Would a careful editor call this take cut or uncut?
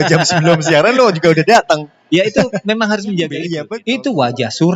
cut